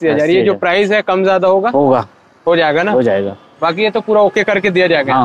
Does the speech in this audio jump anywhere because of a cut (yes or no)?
no